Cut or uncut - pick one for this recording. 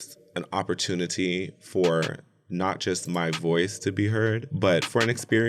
uncut